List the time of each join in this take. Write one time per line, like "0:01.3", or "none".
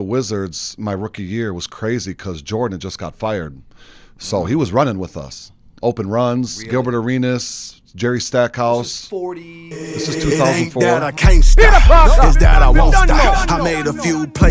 0:11.0